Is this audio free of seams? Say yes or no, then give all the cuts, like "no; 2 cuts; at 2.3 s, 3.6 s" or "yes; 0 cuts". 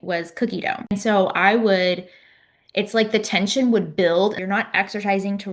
no; 2 cuts; at 0.9 s, 4.3 s